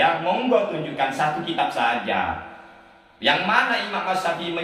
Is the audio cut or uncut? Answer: uncut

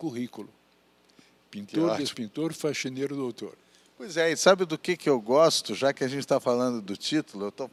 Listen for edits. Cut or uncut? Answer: uncut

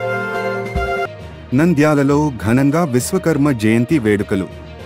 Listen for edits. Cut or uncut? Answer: uncut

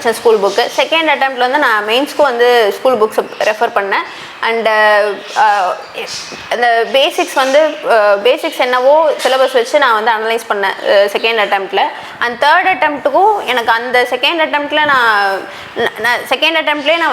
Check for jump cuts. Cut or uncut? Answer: uncut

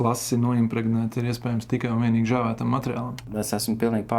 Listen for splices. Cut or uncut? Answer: cut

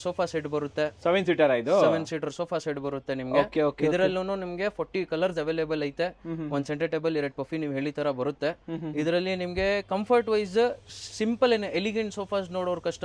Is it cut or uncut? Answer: uncut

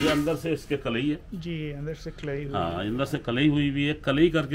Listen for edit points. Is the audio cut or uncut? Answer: uncut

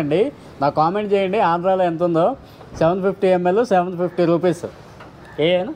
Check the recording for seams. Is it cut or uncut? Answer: uncut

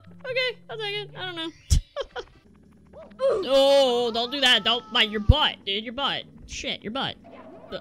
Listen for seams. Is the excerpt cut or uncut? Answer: cut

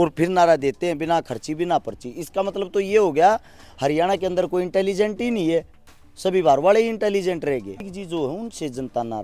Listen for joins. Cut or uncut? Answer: cut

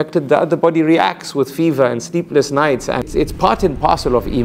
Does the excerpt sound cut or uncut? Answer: cut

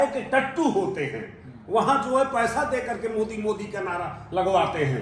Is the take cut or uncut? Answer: uncut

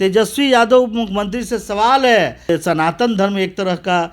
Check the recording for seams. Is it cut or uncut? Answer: cut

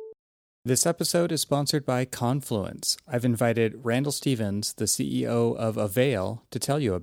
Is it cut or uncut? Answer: uncut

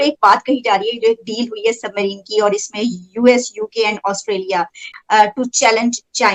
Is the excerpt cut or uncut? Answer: uncut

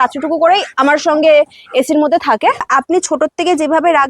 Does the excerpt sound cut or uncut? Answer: cut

